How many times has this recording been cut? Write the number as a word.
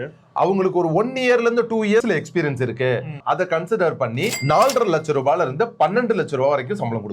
two